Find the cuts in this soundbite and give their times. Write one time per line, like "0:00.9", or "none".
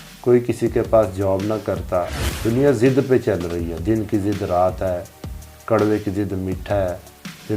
0:02.2